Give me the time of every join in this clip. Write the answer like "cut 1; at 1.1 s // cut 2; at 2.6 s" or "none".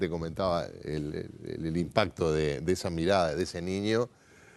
cut 1; at 2.1 s